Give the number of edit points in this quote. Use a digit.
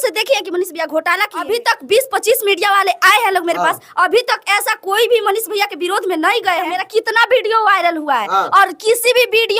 2